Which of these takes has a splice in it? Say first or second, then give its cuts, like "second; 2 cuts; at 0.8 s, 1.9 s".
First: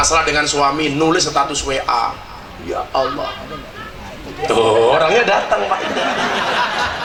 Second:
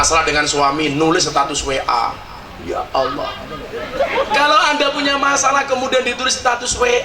second; 1 cut; at 3.8 s